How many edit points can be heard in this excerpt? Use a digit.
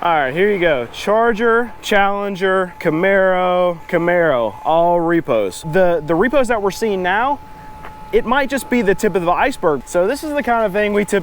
5